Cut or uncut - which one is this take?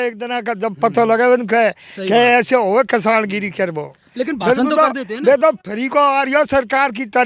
uncut